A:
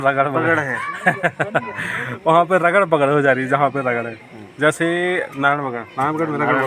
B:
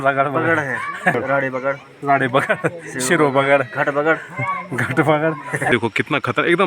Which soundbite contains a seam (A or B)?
B